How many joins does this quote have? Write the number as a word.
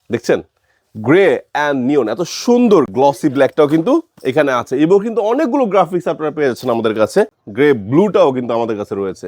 two